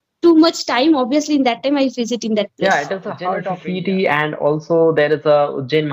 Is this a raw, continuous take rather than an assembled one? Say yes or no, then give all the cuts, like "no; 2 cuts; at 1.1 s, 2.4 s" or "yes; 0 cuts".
no; 1 cut; at 3.3 s